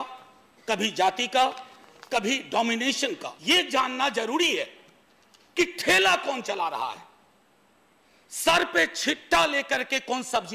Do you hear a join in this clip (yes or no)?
yes